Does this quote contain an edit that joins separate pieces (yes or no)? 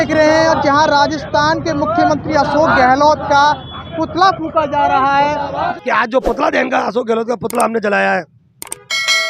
yes